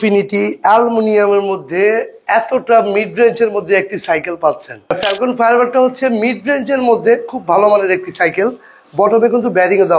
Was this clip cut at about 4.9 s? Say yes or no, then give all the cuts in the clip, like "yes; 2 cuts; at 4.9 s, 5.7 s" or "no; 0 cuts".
yes; 1 cut; at 4.9 s